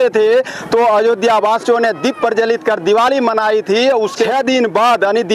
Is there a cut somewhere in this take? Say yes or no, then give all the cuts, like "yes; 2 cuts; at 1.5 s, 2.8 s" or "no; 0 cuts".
yes; 1 cut; at 4.3 s